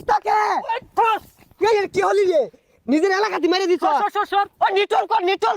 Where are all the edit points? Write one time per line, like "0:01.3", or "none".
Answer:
none